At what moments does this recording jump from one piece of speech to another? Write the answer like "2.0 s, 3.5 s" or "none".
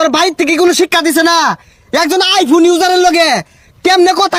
none